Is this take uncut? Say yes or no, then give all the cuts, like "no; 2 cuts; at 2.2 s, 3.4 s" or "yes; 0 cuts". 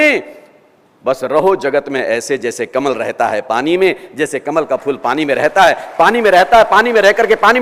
yes; 0 cuts